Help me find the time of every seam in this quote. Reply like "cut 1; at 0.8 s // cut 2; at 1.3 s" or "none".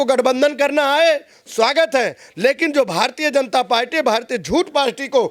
none